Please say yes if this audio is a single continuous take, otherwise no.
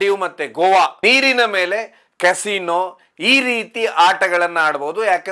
no